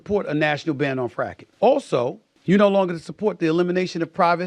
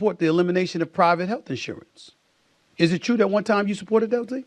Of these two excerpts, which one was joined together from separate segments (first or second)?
first